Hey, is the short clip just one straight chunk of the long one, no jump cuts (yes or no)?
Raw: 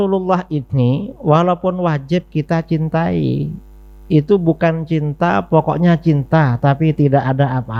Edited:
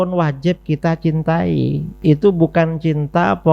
no